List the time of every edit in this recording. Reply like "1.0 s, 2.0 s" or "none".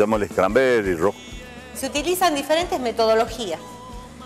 1.2 s